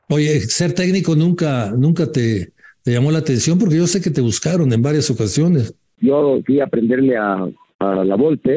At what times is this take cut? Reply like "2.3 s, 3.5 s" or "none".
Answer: 6.0 s, 7.6 s